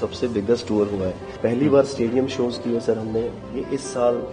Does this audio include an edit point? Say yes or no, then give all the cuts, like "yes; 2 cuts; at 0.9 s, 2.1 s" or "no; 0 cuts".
yes; 1 cut; at 1.3 s